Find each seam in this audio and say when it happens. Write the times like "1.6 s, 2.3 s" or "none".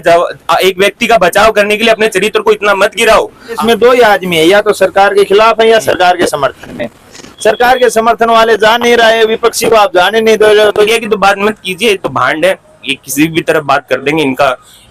3.6 s, 10.9 s